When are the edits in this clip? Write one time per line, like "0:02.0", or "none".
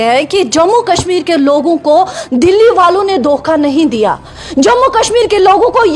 none